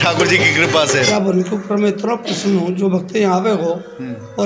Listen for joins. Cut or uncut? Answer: cut